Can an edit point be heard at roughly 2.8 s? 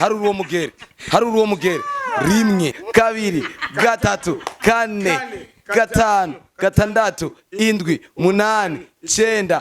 yes; 1 cut; at 2.8 s

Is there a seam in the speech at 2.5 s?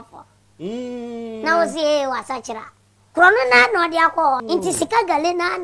no; 1 cut; at 4.4 s

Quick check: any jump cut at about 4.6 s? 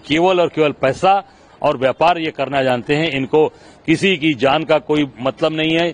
no; 0 cuts

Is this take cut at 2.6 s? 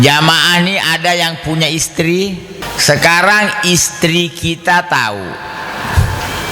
yes; 1 cut; at 2.6 s

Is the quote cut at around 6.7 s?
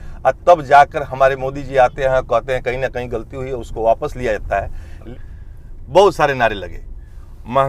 no; 1 cut; at 5.1 s

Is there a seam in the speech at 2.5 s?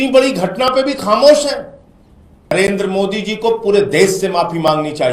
yes; 1 cut; at 2.5 s

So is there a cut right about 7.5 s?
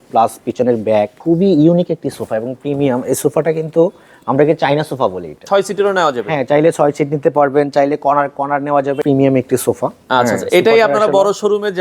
no; 3 cuts; at 1.2 s, 5.4 s, 9.0 s

